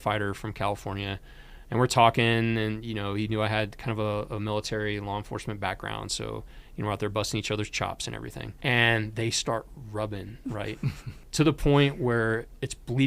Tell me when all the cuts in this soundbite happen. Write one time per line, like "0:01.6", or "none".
0:08.4
0:11.1